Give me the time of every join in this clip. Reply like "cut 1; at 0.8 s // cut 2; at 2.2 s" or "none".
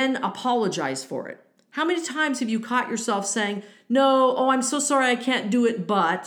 none